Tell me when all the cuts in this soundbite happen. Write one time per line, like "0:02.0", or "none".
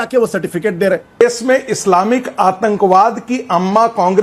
0:01.2